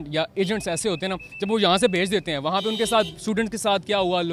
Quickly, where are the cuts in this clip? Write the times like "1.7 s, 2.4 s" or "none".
none

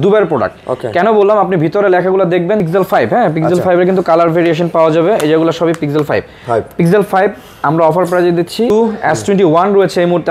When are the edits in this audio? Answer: 2.6 s, 8.7 s

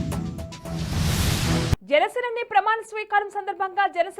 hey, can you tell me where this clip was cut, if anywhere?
1.7 s

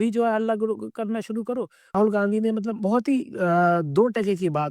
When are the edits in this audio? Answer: 1.9 s

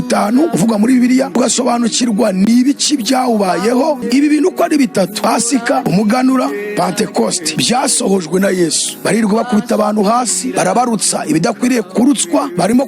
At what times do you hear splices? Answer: 4.0 s

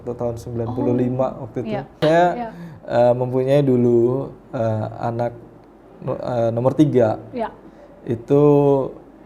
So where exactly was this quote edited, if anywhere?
2.0 s

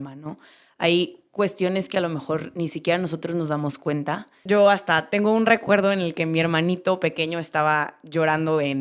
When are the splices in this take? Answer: 4.4 s

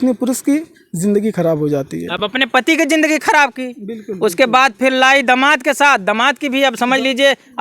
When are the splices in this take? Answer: none

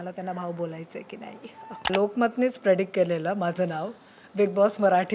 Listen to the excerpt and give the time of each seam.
1.9 s

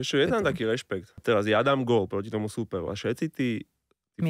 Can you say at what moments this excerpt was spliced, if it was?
1.0 s

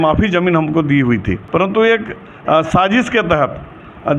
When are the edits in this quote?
1.4 s

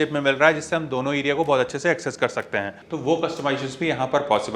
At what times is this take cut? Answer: 2.8 s

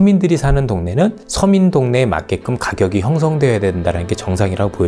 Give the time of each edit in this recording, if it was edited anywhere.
none

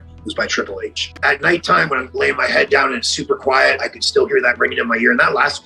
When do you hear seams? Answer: 1.1 s

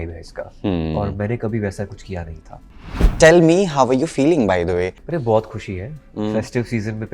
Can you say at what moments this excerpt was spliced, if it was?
3.0 s, 5.0 s

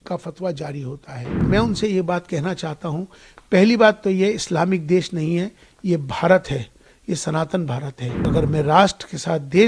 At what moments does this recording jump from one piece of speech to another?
1.4 s, 8.3 s

